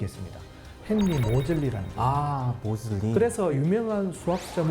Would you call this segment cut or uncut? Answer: cut